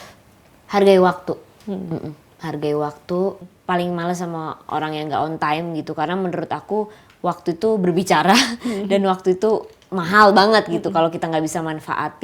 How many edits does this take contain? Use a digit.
1